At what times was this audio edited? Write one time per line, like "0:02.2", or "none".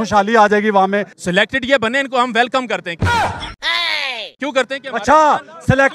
0:01.2
0:02.9
0:04.3